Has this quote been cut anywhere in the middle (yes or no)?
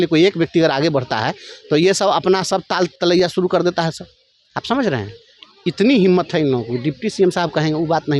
no